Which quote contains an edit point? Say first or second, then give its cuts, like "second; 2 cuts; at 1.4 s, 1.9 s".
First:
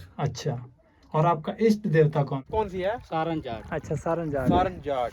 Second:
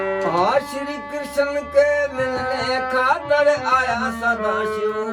first; 1 cut; at 2.5 s